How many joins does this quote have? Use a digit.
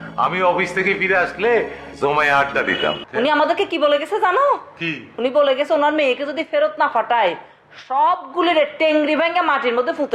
1